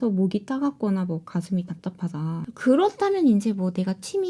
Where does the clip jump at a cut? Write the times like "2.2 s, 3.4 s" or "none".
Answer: none